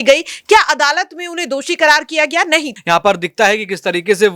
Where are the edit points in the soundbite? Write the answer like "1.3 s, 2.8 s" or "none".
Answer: 2.7 s